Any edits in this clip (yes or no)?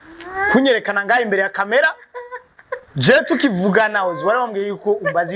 no